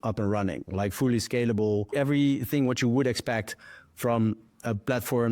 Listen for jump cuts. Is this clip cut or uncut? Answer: cut